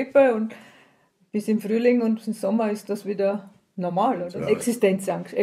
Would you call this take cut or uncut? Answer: cut